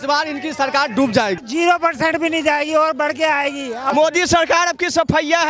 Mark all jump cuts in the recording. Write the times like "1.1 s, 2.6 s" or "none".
1.4 s, 3.9 s